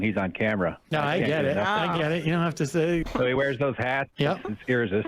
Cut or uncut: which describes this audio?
cut